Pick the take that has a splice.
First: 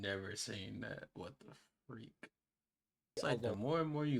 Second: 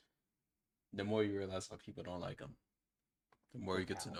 first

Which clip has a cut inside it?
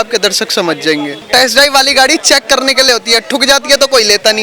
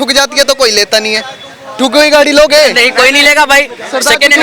first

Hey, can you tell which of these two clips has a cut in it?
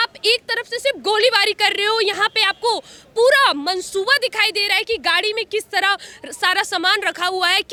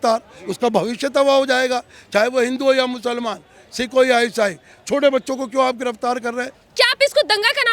second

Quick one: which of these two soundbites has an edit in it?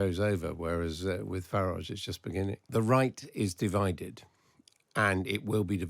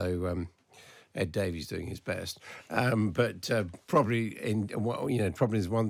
first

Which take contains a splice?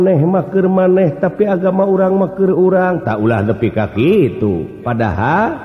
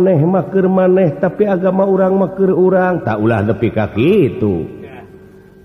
first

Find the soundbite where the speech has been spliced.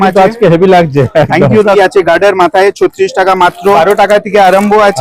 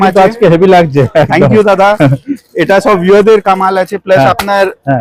first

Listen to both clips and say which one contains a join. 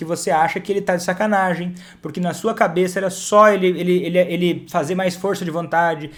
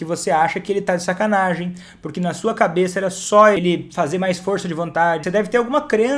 second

